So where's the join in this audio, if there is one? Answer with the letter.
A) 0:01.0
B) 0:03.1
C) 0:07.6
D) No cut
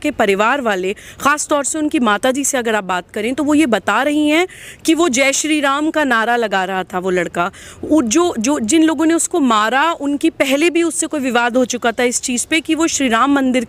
D